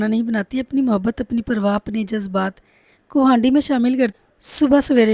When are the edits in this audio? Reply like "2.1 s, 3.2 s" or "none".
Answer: 4.2 s